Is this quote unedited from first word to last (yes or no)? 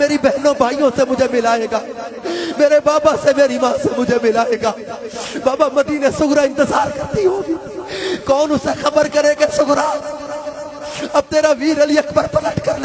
yes